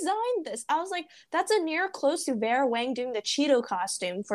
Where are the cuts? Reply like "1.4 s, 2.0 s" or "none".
none